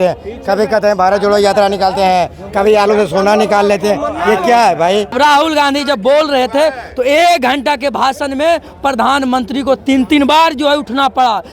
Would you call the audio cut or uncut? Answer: cut